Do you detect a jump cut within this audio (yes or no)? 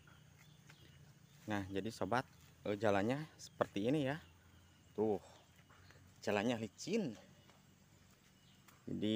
no